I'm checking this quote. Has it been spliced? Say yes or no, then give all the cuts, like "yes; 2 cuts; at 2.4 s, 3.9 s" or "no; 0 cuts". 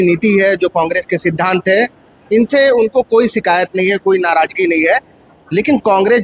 no; 0 cuts